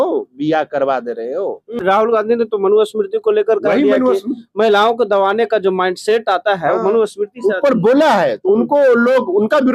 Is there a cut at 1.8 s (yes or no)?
yes